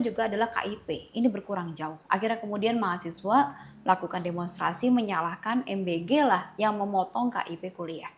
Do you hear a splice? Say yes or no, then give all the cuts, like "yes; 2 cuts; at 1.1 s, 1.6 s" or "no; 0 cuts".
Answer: no; 0 cuts